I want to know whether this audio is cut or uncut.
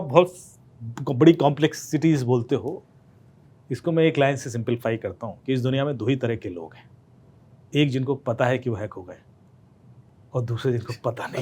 uncut